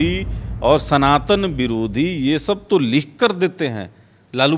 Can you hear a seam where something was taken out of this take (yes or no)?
no